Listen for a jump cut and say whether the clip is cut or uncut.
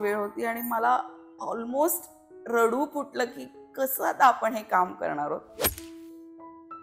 uncut